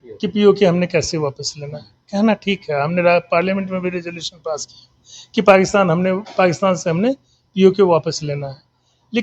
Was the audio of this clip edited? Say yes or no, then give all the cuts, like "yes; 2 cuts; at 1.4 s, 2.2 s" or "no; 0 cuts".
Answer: no; 0 cuts